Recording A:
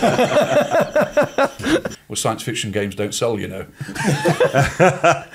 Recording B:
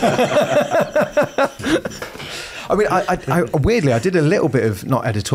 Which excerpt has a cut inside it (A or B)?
A